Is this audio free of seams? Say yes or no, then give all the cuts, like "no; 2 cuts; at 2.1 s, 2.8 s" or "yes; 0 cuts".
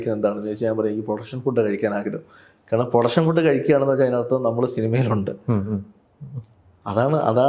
yes; 0 cuts